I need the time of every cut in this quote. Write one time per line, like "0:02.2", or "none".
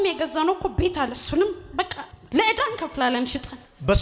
none